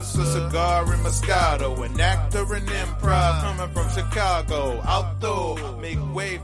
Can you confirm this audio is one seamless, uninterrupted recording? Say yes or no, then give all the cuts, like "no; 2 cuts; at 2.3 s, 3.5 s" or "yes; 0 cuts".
yes; 0 cuts